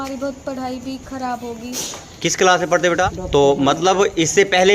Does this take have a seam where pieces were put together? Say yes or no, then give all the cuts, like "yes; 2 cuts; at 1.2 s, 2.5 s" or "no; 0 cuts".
yes; 1 cut; at 3.1 s